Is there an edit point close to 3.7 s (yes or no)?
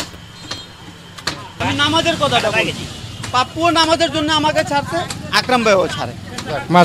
no